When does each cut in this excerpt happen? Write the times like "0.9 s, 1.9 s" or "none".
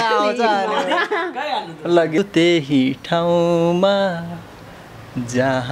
2.2 s